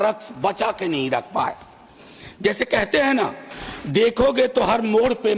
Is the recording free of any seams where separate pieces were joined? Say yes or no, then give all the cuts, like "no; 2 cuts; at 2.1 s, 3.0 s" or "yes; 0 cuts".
yes; 0 cuts